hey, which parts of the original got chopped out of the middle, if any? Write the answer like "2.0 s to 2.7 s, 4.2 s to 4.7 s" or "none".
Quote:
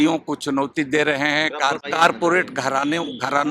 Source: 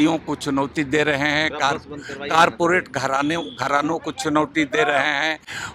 1.9 s to 2.2 s